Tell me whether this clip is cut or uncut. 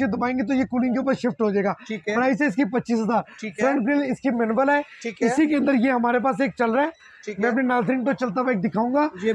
uncut